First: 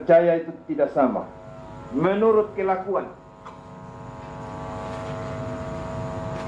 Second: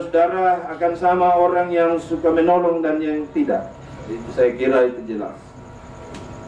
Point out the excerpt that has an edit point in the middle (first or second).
first